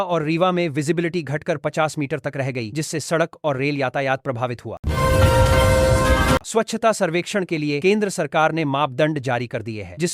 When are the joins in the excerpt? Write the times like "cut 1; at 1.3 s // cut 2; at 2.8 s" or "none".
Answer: cut 1; at 4.7 s // cut 2; at 6.5 s